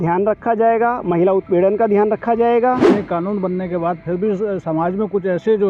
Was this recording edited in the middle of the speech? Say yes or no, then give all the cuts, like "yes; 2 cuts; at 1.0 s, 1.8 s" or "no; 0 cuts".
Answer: yes; 1 cut; at 2.9 s